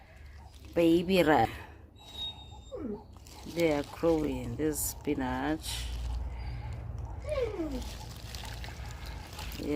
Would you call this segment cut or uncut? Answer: cut